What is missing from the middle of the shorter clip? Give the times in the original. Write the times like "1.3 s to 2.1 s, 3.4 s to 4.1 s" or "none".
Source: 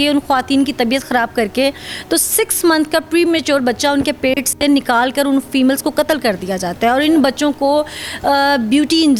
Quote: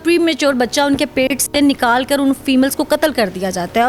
none